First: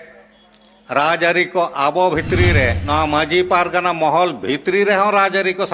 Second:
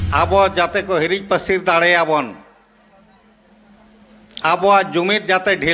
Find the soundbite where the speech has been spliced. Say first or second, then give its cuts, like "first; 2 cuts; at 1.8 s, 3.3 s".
first; 1 cut; at 2.8 s